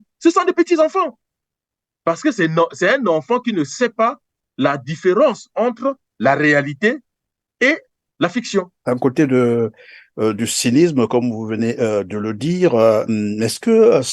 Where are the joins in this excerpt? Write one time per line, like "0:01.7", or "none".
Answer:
0:08.8